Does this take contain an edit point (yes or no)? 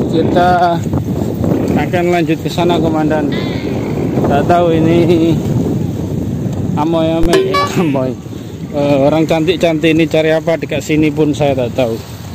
no